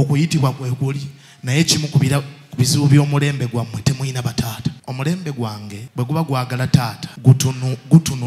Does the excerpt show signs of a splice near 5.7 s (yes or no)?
yes